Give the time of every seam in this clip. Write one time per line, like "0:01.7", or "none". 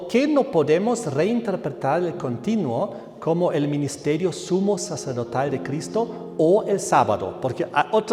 none